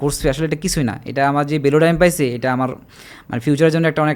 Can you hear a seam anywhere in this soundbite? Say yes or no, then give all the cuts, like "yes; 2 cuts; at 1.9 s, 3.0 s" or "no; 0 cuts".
no; 0 cuts